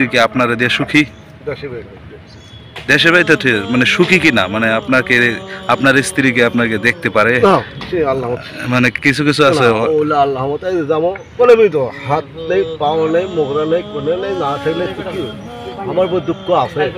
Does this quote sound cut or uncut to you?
cut